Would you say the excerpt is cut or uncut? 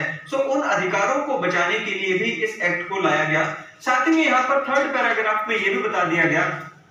uncut